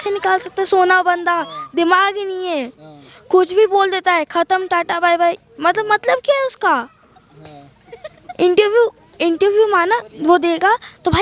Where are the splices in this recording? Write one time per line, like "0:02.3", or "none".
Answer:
none